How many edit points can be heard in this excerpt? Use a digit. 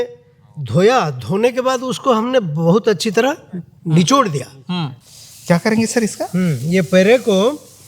1